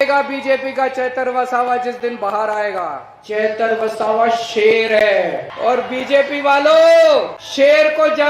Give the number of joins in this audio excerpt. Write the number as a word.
three